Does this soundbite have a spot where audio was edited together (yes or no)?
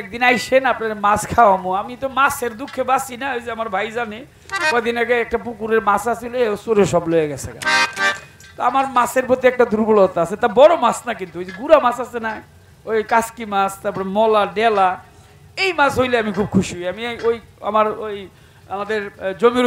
no